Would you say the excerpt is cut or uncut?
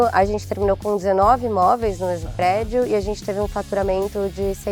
uncut